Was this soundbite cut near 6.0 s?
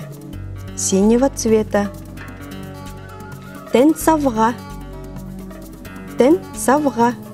yes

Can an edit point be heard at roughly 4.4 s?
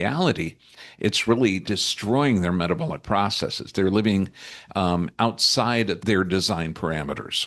no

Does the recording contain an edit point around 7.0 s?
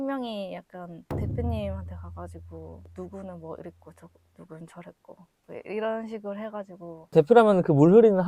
yes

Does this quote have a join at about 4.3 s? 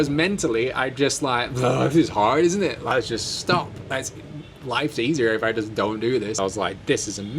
no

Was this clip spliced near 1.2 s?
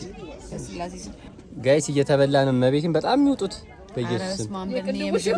yes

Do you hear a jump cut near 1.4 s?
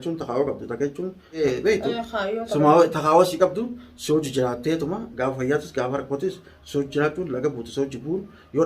yes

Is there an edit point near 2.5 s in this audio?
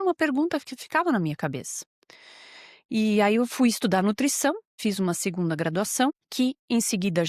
no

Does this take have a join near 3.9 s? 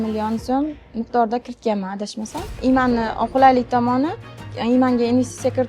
no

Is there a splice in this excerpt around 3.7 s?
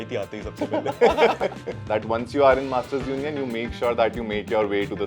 no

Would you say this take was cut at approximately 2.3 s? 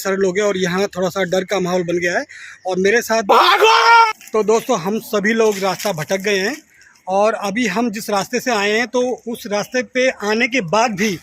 no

